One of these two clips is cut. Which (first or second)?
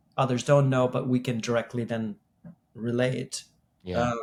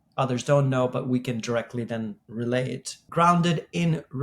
second